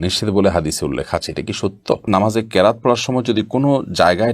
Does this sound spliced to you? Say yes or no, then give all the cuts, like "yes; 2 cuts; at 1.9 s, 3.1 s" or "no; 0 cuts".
yes; 1 cut; at 2.1 s